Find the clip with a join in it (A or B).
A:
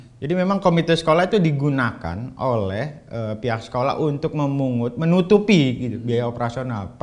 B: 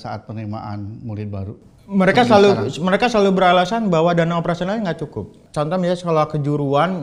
B